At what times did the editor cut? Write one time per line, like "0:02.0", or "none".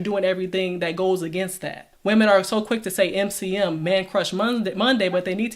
0:01.9